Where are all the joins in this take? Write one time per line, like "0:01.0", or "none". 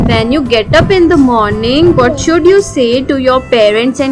none